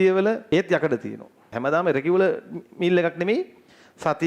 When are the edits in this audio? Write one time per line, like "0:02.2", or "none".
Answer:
0:01.5